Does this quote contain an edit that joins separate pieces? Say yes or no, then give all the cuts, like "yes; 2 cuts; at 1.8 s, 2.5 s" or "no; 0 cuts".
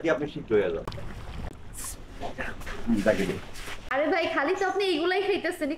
yes; 2 cuts; at 1.5 s, 3.8 s